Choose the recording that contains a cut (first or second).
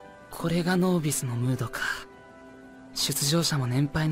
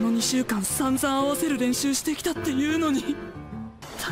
second